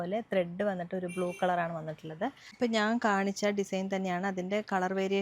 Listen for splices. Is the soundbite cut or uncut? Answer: cut